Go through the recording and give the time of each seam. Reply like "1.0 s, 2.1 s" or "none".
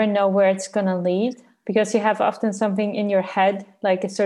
none